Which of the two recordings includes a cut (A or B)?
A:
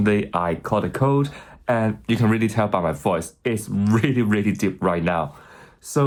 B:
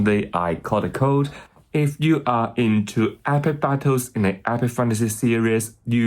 B